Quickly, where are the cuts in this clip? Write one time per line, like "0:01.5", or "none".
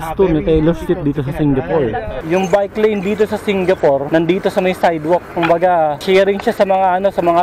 0:02.1
0:04.1
0:06.0